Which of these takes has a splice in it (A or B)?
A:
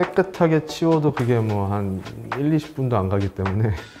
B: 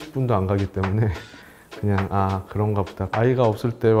B